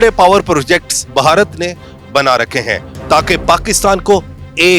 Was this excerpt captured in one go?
no; 1 cut; at 2.9 s

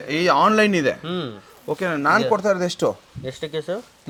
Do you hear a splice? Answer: no; 0 cuts

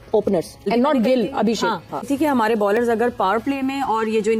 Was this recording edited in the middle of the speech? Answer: no; 0 cuts

